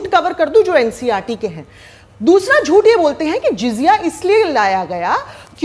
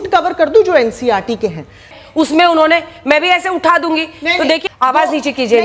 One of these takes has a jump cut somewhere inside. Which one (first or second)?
second